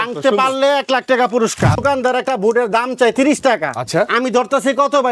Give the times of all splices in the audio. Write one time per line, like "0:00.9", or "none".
0:01.8